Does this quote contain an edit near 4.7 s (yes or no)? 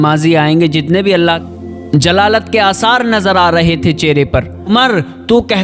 yes